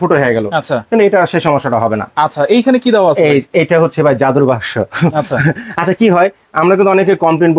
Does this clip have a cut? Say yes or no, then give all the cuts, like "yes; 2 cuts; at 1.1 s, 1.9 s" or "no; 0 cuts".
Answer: no; 0 cuts